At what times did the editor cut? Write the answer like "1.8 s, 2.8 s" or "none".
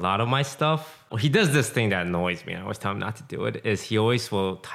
1.1 s